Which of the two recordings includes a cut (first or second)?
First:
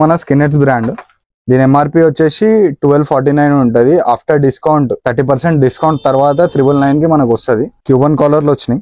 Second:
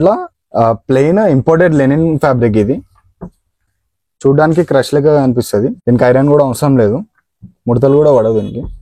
first